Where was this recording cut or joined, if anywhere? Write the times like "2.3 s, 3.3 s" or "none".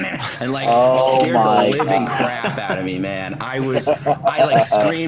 none